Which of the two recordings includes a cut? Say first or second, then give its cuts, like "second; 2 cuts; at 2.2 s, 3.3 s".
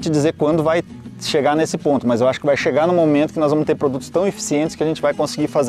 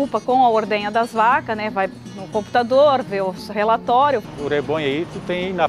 second; 1 cut; at 4.3 s